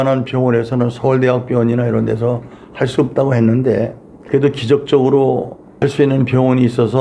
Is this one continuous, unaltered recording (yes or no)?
yes